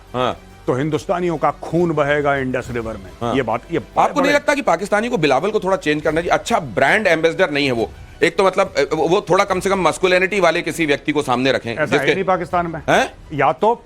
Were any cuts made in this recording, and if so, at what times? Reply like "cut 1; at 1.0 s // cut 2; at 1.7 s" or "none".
none